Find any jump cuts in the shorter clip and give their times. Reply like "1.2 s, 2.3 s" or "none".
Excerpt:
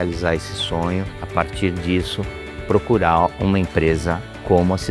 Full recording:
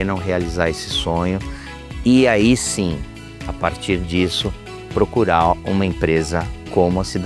1.2 s